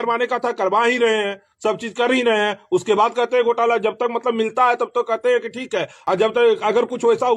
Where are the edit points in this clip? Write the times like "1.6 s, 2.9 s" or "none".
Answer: none